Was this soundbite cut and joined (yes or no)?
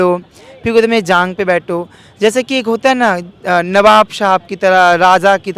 no